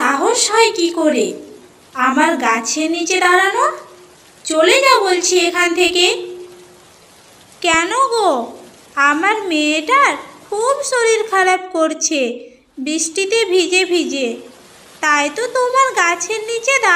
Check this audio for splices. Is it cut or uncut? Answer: uncut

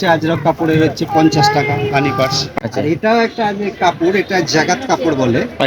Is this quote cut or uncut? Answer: cut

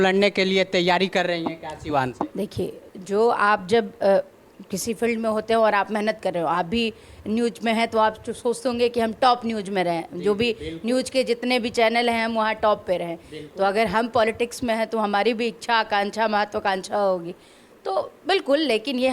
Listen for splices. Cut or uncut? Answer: uncut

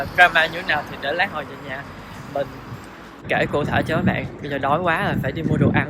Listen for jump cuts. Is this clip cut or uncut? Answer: uncut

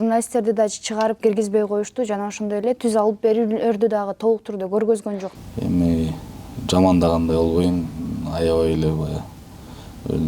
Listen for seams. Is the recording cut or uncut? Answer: cut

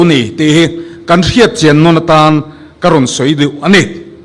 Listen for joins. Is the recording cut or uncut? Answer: uncut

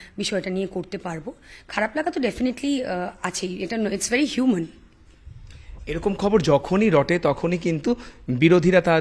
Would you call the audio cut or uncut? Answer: uncut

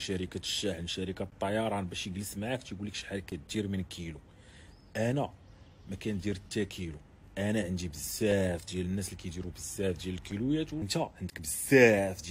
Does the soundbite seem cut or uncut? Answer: cut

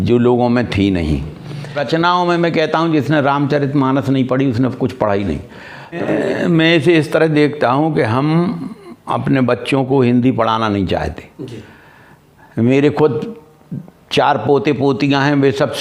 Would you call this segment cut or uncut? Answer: cut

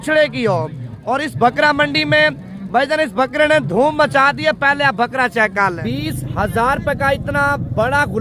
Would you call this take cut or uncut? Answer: cut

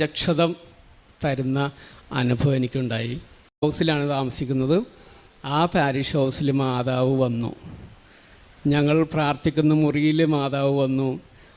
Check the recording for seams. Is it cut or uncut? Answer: cut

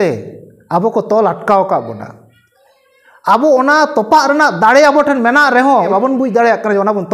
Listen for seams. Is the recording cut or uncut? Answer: cut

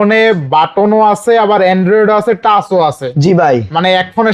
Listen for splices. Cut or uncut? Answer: uncut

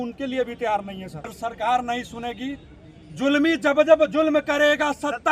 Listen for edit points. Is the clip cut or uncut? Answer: cut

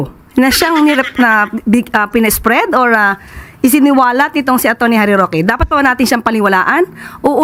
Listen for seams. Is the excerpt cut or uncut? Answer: uncut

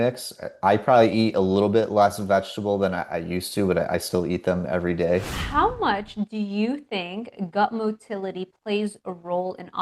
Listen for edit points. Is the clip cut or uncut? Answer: cut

